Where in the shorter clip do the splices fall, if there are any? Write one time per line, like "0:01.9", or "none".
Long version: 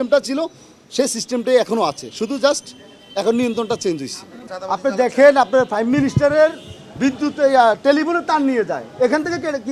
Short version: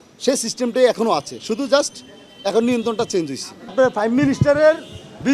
0:03.7